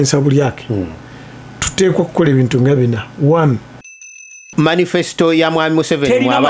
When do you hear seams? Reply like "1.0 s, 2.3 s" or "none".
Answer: 4.3 s

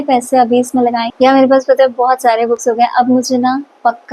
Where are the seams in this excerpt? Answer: 1.0 s

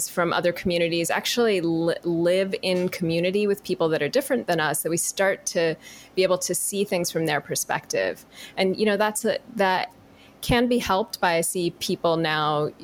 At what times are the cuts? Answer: none

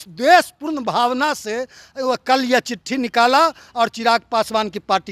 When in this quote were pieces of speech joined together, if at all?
none

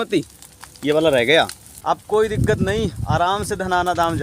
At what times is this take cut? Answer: 1.7 s

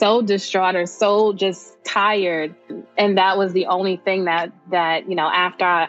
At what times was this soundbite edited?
2.8 s

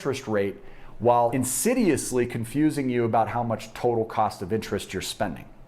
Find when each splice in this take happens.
1.3 s

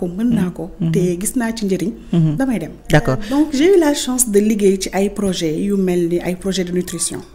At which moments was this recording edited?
3.2 s

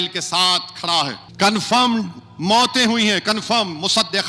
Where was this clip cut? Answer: 1.2 s

